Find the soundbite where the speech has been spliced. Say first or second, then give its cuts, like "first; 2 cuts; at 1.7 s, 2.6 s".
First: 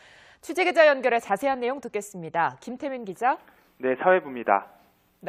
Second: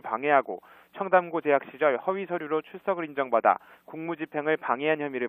second; 1 cut; at 1.1 s